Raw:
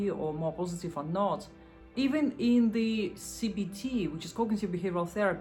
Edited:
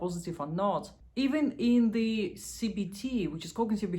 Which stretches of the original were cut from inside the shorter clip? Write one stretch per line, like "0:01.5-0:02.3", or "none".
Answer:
0:01.5-0:01.8